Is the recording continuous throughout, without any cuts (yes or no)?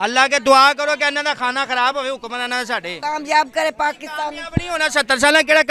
no